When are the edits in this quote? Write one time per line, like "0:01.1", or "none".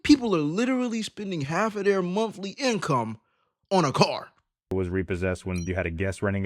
0:04.7
0:05.7